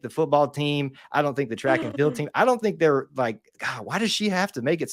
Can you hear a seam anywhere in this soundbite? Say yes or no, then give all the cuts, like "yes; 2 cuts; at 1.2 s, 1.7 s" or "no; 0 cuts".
no; 0 cuts